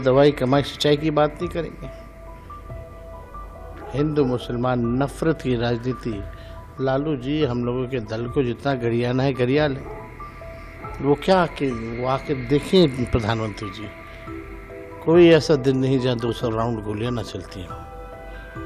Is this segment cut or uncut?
cut